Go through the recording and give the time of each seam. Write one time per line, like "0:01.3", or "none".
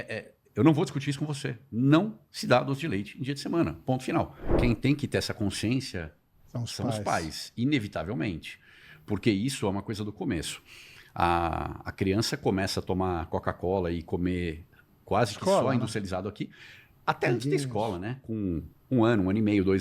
0:04.6